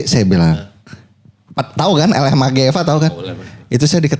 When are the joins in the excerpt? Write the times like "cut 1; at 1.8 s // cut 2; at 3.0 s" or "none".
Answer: none